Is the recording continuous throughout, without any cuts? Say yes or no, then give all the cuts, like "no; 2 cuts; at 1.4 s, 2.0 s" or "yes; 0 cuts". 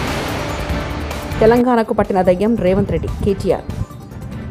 yes; 0 cuts